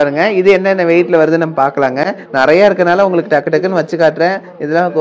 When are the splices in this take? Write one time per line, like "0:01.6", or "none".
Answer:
none